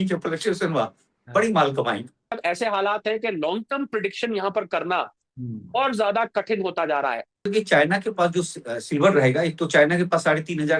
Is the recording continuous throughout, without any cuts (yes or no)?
no